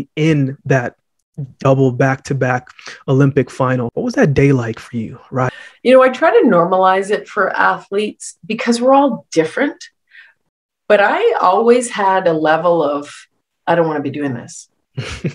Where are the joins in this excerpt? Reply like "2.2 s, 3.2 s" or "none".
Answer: 3.9 s, 5.5 s